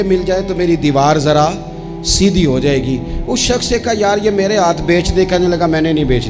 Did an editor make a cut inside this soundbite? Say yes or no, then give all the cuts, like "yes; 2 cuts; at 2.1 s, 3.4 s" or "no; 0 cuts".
no; 0 cuts